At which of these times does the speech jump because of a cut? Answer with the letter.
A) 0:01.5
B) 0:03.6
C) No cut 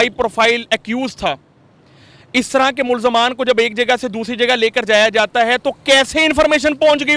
C